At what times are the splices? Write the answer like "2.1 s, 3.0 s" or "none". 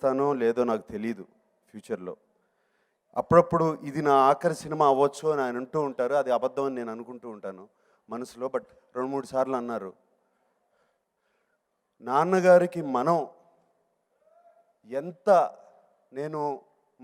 none